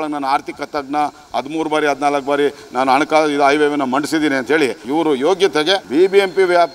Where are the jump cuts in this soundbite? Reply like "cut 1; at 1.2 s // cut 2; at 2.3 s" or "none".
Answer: cut 1; at 4.8 s // cut 2; at 5.8 s